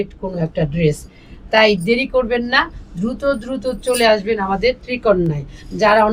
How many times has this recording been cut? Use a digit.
0